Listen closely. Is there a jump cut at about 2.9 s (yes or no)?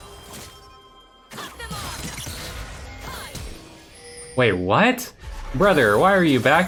no